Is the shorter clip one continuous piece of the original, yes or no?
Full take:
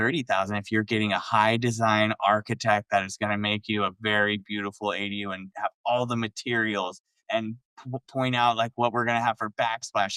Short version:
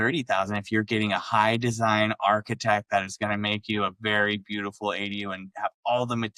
yes